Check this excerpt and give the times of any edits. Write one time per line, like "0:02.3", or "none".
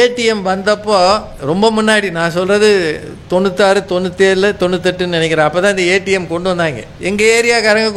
0:01.3
0:06.9